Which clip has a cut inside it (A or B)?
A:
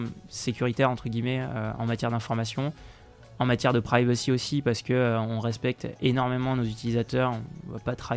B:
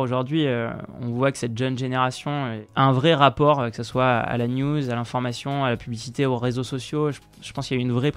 B